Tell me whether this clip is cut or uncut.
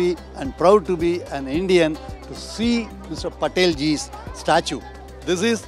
uncut